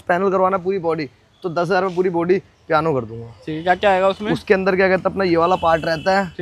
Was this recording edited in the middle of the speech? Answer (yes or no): no